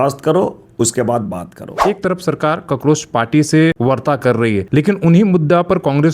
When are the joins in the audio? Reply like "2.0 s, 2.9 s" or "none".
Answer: 1.7 s, 3.8 s, 4.7 s